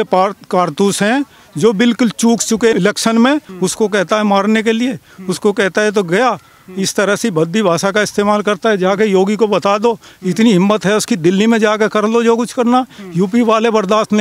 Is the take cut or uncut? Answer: cut